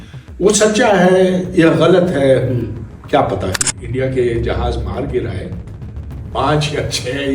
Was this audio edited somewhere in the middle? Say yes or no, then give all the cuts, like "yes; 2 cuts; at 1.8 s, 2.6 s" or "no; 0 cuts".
yes; 1 cut; at 3.7 s